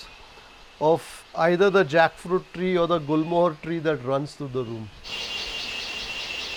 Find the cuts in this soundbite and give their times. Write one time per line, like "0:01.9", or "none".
none